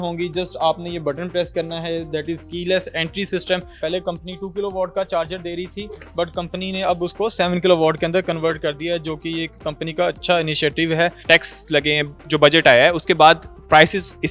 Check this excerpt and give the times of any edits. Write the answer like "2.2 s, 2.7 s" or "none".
3.8 s, 11.2 s